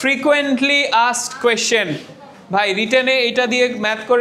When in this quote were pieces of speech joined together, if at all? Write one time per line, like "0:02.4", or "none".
none